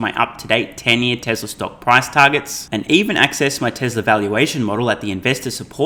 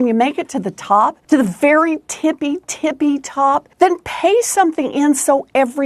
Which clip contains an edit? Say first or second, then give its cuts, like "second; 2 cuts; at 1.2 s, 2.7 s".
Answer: second; 2 cuts; at 1.2 s, 3.7 s